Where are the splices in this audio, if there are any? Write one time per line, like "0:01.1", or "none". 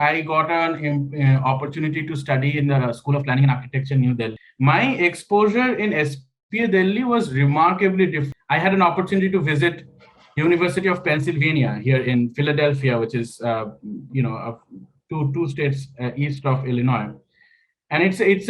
0:04.4
0:08.2